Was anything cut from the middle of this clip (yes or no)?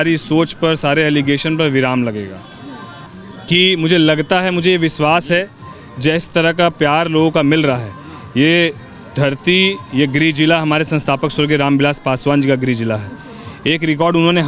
yes